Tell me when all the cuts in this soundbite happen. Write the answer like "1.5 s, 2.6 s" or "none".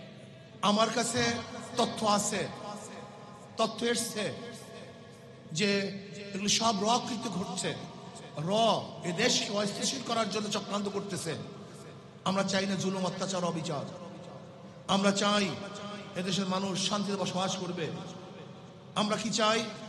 none